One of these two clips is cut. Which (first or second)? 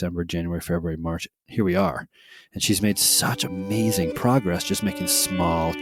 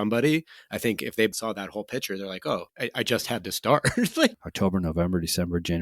second